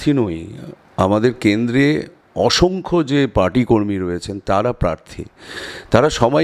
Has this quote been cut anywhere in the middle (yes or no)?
no